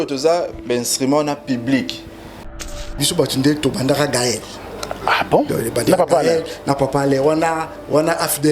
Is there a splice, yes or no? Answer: yes